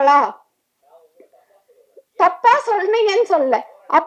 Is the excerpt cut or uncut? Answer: uncut